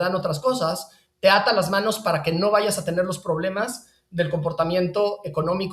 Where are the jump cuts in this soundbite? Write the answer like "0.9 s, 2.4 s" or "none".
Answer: none